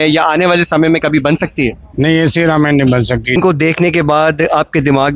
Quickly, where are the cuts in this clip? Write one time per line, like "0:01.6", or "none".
0:03.4